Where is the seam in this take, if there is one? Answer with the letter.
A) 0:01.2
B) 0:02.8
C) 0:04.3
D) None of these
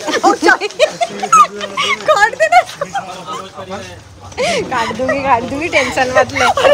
D